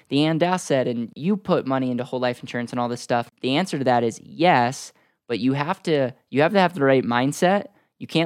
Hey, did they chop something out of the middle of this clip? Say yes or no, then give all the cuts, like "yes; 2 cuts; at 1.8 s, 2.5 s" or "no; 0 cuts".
yes; 2 cuts; at 1.1 s, 3.3 s